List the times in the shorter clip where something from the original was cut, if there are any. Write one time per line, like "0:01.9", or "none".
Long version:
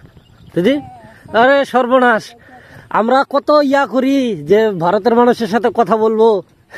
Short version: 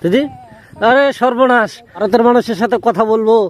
0:02.0